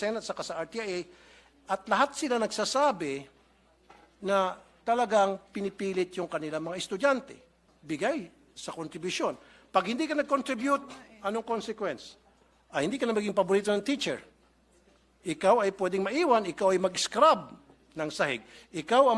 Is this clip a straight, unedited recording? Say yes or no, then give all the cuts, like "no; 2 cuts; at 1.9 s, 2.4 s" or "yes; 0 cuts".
no; 1 cut; at 7.7 s